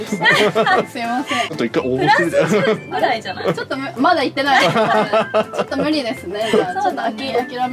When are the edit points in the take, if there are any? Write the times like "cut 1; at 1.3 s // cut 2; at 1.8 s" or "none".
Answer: cut 1; at 1.5 s